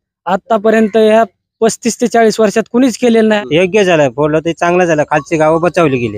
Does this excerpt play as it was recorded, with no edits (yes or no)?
no